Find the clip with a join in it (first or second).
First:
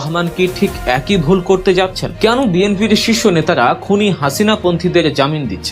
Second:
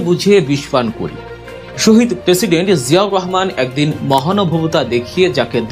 first